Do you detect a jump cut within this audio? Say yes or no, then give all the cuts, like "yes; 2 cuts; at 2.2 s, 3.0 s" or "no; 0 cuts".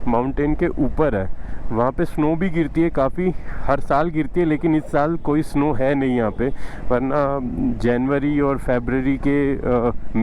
no; 0 cuts